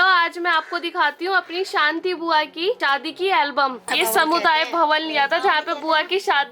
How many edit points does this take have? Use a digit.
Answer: 2